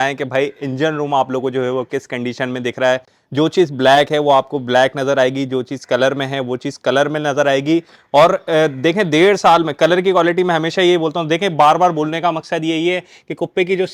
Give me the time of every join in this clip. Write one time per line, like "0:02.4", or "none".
none